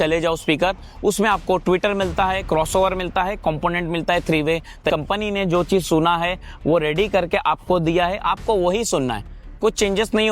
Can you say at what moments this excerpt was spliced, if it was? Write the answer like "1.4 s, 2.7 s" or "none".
4.9 s